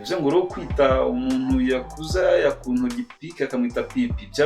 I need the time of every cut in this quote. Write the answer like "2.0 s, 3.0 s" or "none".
none